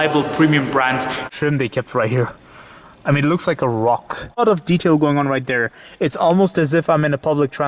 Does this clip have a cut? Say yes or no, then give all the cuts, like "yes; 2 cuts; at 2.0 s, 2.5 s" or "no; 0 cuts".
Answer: yes; 2 cuts; at 1.3 s, 4.4 s